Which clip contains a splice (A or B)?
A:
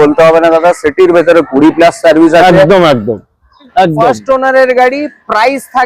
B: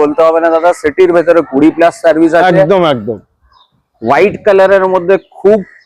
A